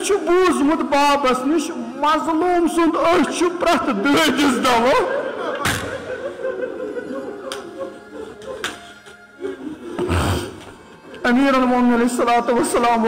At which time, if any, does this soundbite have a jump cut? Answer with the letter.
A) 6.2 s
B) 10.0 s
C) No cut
C